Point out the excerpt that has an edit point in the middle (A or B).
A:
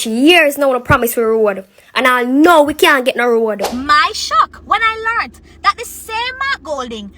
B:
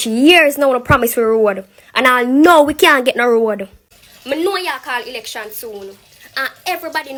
A